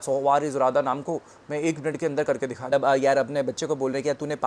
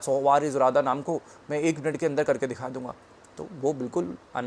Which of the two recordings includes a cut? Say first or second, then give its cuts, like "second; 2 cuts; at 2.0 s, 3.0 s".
first; 1 cut; at 2.7 s